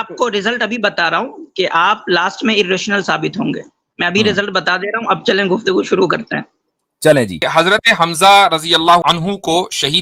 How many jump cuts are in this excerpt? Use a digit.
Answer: 2